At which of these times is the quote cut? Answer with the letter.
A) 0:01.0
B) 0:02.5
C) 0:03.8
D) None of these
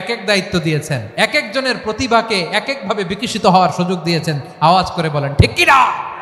A